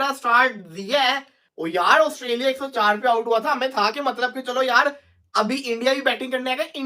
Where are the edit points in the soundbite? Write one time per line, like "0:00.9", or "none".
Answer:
0:01.5